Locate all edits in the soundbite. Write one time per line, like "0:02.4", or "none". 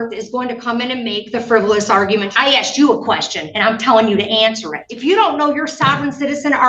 0:02.3
0:04.9